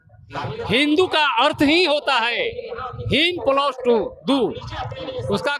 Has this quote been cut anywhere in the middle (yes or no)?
no